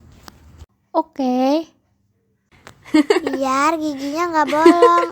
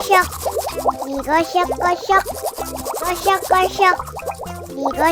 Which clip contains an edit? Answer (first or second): second